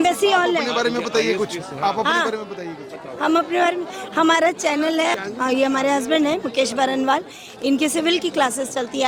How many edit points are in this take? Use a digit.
1